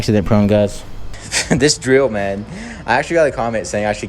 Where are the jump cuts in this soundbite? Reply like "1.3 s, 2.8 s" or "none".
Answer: 1.2 s